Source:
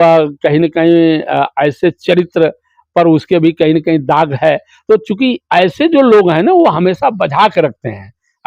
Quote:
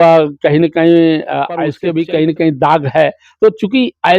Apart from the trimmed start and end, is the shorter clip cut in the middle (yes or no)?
yes